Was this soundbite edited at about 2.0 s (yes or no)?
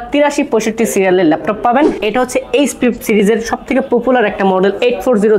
yes